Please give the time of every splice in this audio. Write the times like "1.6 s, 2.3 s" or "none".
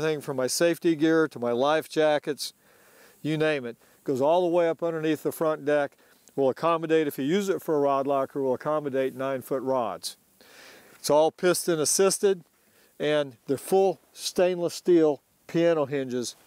8.8 s